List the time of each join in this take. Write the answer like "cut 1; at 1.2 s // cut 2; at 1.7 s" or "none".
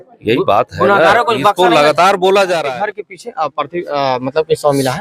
cut 1; at 2.7 s